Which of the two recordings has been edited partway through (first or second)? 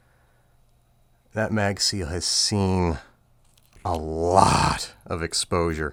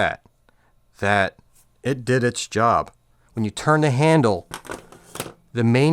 second